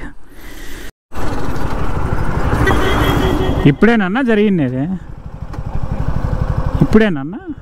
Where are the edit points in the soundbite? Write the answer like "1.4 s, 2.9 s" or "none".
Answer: 1.0 s